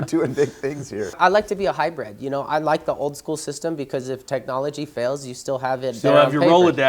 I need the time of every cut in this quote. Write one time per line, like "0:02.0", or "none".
0:01.2

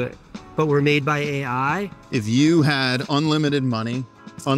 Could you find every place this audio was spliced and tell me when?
0:02.0

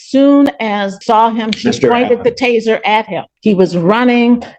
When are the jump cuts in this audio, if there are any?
0:00.9
0:03.3

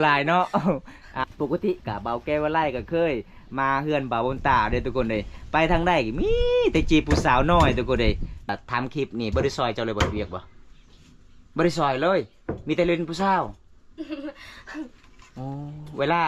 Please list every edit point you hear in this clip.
0:01.2
0:08.5

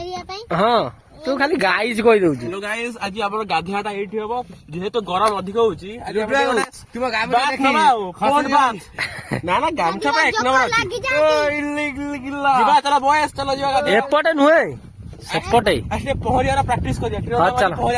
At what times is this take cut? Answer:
none

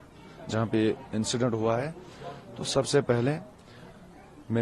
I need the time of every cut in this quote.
none

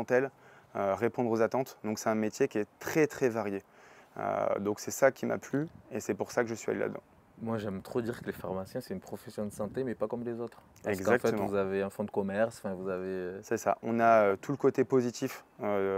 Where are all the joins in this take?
none

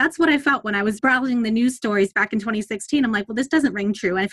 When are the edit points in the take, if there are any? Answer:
0:01.0

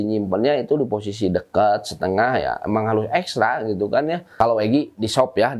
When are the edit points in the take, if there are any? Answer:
0:04.2

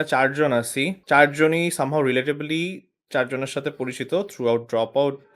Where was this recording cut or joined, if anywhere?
0:01.0

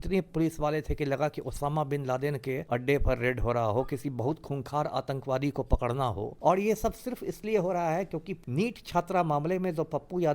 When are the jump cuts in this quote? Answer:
0:02.6
0:06.3
0:08.4

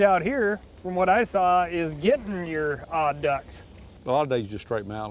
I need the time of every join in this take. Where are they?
0:03.9

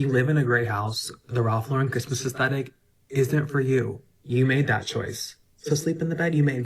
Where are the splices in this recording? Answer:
none

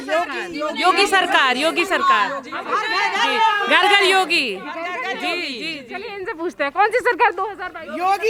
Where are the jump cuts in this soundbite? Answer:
none

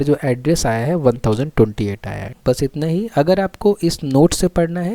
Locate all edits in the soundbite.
0:02.3

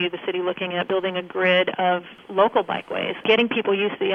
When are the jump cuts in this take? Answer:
0:00.9
0:02.2
0:03.2

